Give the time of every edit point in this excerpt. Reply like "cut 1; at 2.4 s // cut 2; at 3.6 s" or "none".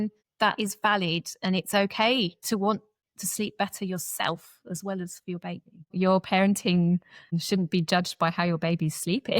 cut 1; at 5.9 s // cut 2; at 7.4 s